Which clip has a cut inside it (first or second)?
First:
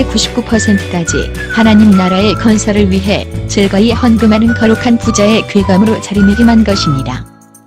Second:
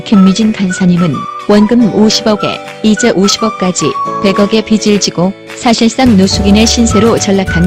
first